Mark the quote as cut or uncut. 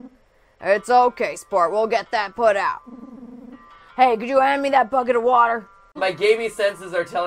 cut